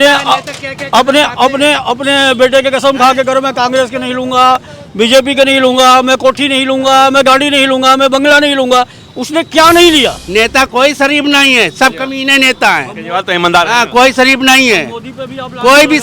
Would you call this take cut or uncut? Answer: cut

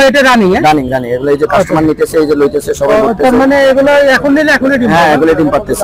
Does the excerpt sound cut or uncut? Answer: uncut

